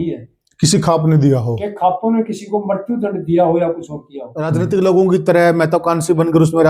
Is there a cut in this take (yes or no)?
yes